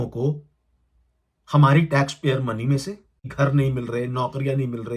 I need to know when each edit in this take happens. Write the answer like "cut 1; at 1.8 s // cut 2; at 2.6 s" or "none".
cut 1; at 3.2 s